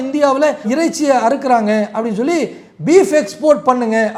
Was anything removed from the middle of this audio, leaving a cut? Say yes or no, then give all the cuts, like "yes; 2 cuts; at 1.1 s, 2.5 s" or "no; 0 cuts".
no; 0 cuts